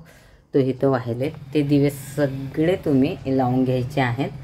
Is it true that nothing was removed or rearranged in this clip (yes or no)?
no